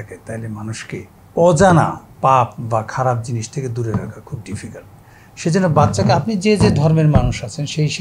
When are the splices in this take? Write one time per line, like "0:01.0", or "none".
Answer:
0:01.2
0:02.0